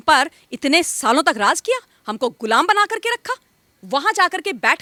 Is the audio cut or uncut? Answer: uncut